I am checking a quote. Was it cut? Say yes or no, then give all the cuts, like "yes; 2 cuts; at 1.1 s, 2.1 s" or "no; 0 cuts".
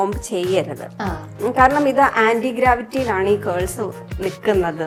no; 0 cuts